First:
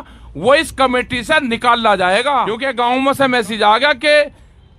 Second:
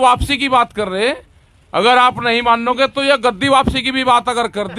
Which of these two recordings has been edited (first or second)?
first